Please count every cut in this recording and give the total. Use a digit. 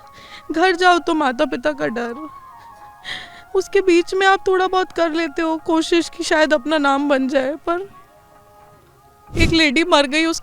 1